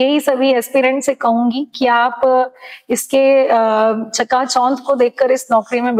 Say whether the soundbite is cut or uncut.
uncut